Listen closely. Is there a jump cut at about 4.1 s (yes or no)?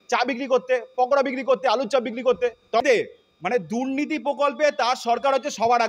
no